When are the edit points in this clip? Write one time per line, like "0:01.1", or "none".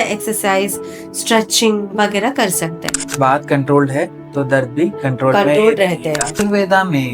0:03.0
0:06.4